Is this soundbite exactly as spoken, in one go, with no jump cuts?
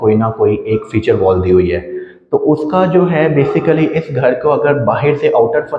yes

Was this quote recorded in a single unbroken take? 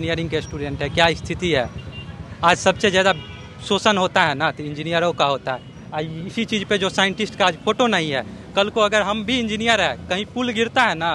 yes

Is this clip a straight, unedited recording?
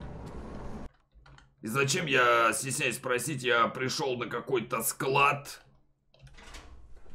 yes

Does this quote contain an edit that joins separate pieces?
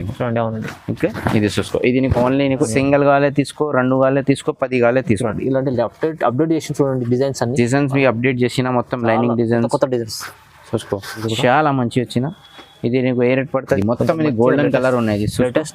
yes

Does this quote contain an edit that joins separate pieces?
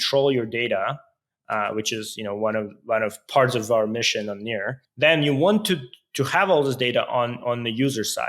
yes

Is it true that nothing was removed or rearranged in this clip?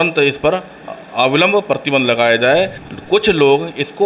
no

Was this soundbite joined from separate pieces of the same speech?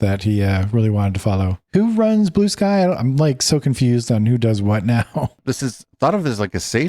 yes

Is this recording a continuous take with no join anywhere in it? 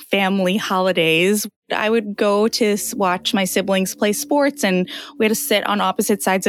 yes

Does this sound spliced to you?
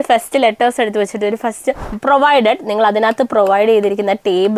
yes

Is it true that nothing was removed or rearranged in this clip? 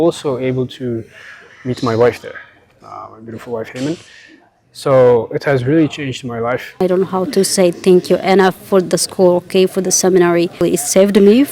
no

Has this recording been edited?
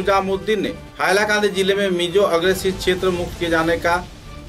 no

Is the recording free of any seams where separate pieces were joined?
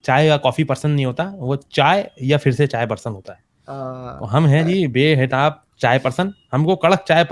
yes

